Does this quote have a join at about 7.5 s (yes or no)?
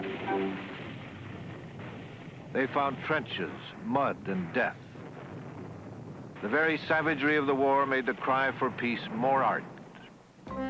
no